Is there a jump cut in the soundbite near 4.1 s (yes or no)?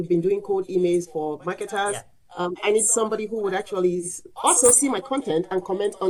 no